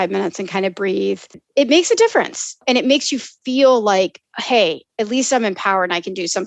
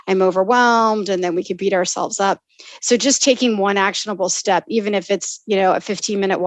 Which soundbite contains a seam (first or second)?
first